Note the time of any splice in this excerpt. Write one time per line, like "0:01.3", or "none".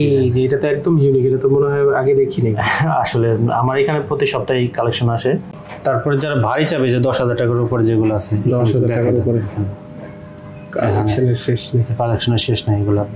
0:05.5